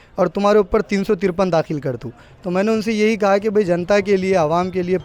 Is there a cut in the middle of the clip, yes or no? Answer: no